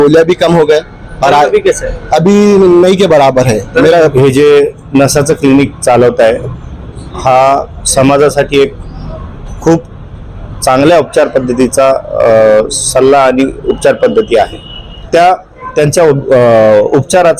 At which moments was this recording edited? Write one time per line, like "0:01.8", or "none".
0:04.1
0:15.0